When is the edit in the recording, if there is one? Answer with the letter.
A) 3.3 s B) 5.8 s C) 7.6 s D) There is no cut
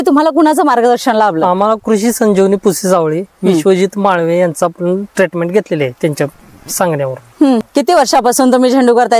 C